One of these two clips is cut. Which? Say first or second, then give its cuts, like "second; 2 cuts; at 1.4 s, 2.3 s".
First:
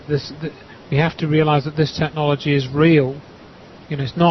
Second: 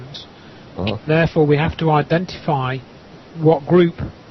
second; 1 cut; at 2.2 s